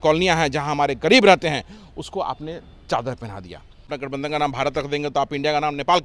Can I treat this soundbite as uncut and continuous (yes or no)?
no